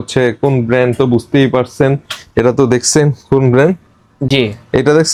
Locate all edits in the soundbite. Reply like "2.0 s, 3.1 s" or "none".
none